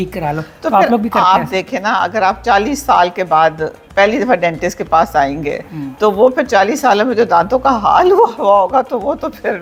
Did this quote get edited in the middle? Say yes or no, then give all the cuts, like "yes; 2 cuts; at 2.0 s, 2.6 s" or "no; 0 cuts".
no; 0 cuts